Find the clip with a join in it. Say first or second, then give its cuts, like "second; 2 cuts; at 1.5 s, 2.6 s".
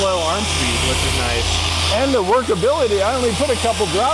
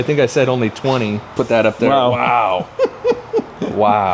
second; 1 cut; at 1.2 s